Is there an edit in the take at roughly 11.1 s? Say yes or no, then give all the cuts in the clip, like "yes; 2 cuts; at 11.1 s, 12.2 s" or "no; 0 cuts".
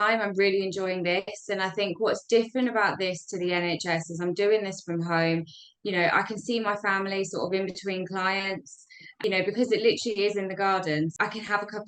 yes; 2 cuts; at 9.1 s, 11.1 s